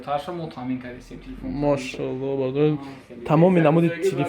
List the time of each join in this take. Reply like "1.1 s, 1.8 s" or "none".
none